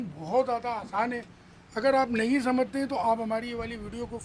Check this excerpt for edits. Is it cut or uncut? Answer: uncut